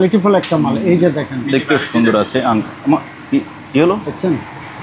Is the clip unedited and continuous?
yes; 0 cuts

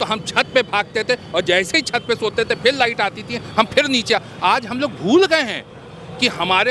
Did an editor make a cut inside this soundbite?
no; 0 cuts

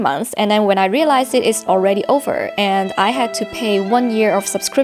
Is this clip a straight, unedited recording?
yes; 0 cuts

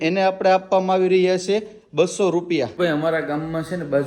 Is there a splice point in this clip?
yes; 1 cut; at 2.8 s

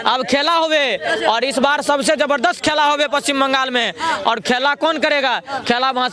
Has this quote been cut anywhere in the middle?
no; 0 cuts

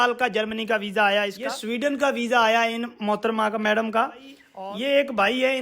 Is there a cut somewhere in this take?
yes; 2 cuts; at 1.5 s, 4.4 s

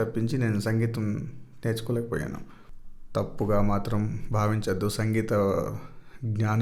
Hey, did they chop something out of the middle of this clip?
no; 0 cuts

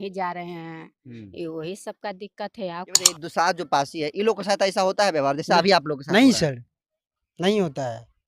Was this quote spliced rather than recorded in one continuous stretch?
yes; 1 cut; at 3.2 s

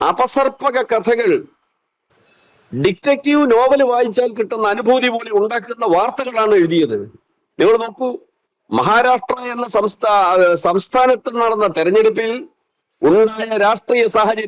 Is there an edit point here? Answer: no; 0 cuts

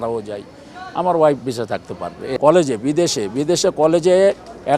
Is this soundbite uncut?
no; 1 cut; at 2.2 s

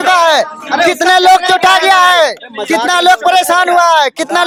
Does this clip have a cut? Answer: no; 0 cuts

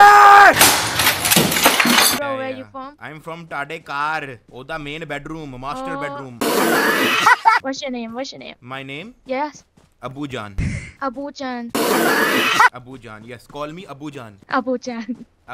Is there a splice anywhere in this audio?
yes; 1 cut; at 2.2 s

